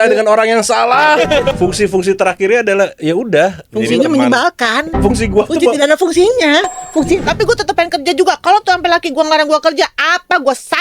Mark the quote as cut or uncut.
cut